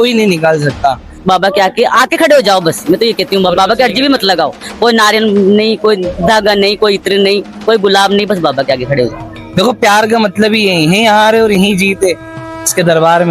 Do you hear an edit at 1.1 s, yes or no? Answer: yes